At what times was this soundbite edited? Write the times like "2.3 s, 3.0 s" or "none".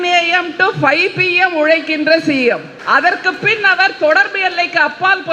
2.7 s

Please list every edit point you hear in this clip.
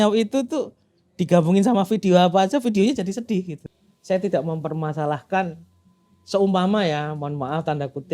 3.7 s

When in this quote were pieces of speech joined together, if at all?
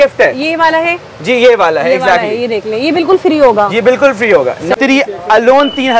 4.7 s

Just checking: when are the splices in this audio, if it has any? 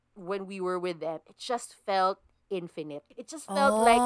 3.0 s

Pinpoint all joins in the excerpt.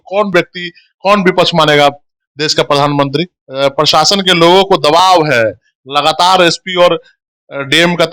3.4 s

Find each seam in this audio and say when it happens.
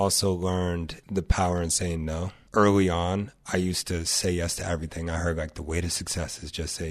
0.9 s, 2.4 s

